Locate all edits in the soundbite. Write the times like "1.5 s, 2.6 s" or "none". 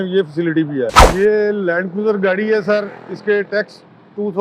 1.0 s